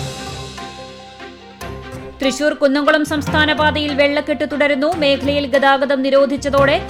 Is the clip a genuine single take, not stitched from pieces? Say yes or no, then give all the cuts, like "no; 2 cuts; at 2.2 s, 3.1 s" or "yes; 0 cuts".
yes; 0 cuts